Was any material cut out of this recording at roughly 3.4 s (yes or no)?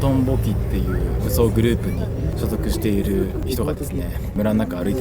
yes